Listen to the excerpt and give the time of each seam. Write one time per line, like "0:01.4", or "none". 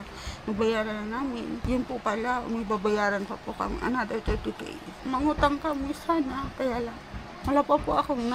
0:01.6
0:04.9
0:07.3